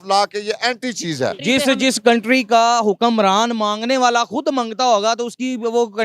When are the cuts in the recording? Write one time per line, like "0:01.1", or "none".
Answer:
0:01.4